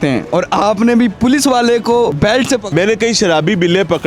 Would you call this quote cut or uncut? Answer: cut